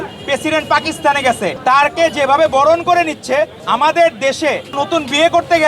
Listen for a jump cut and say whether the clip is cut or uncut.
cut